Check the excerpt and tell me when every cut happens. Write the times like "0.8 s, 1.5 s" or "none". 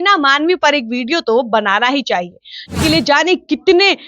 2.7 s